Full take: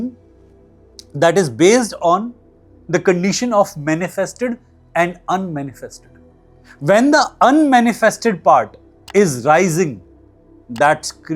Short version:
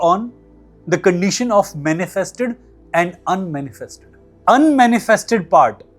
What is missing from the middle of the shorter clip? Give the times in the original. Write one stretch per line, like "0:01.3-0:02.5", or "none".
0:06.4-0:07.3